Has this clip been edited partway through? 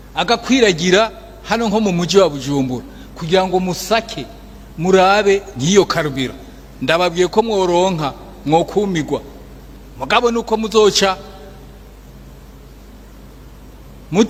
no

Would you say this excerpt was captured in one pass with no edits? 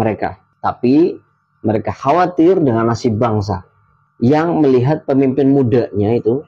yes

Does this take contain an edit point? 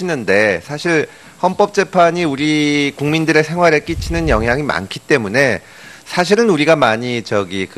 yes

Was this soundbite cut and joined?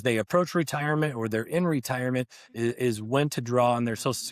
no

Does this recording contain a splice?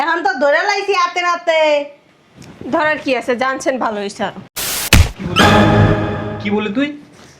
yes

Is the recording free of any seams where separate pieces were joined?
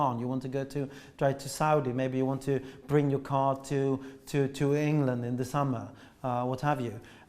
yes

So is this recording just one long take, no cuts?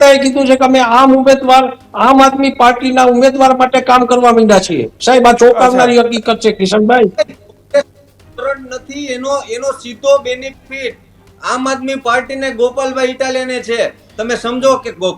yes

